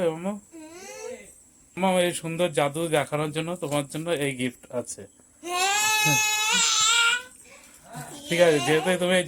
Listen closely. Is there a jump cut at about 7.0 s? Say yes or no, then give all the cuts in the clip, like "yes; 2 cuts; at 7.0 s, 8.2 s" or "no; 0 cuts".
no; 1 cut; at 1.8 s